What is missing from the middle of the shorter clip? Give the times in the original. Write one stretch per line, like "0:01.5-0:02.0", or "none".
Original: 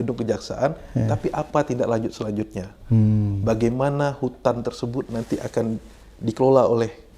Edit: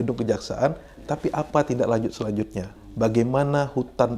0:02.8-0:03.3